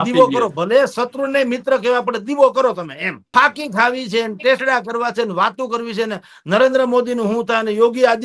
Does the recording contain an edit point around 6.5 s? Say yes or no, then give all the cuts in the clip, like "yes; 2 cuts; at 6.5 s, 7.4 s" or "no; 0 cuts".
no; 1 cut; at 3.3 s